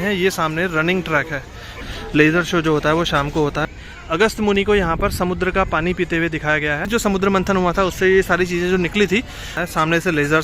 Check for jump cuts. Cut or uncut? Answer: cut